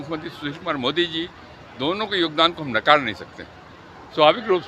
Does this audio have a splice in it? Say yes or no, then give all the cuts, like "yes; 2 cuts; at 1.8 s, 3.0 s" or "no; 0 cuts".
no; 0 cuts